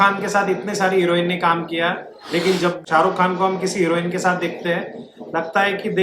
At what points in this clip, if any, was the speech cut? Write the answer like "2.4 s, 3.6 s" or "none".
2.8 s